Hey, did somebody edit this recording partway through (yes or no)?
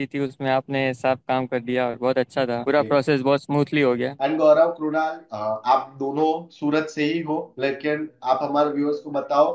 yes